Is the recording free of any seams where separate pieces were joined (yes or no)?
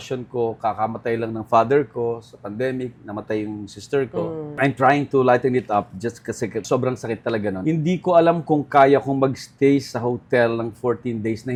yes